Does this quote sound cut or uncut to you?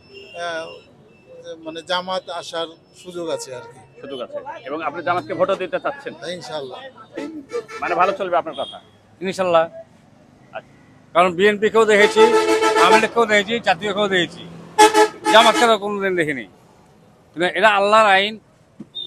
cut